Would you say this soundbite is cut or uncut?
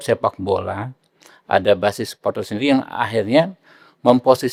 uncut